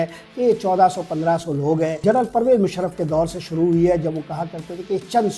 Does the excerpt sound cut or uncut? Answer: cut